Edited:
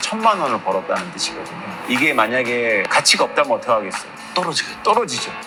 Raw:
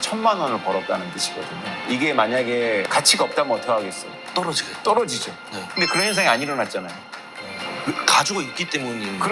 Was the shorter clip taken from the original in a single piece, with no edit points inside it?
yes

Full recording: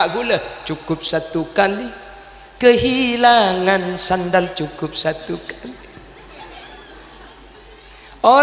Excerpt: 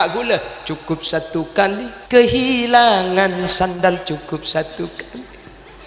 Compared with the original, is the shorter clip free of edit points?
no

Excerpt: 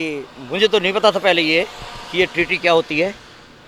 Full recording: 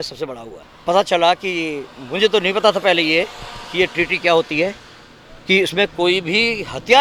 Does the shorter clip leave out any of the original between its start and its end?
no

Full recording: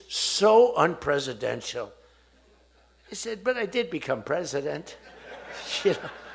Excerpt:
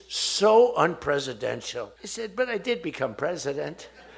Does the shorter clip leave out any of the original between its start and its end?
yes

